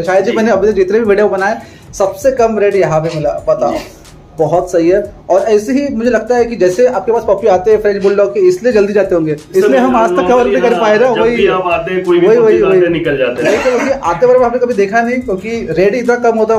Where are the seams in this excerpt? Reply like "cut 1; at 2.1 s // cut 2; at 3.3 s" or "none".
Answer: none